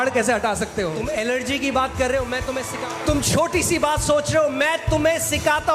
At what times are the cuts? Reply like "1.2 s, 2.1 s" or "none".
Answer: 1.0 s, 2.6 s